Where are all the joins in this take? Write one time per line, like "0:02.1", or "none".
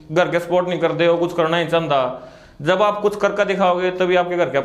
none